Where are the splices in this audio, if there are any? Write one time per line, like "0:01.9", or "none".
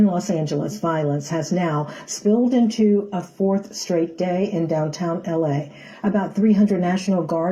0:06.6